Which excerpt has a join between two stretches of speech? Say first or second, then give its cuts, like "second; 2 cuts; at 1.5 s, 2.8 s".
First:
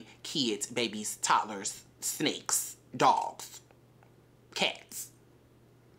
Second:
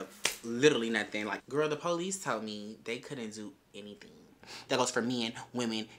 second; 2 cuts; at 1.3 s, 4.5 s